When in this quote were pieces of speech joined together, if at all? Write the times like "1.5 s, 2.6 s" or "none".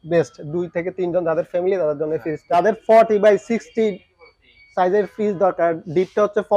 2.5 s